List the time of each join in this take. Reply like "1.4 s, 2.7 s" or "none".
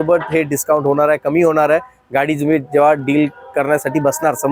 none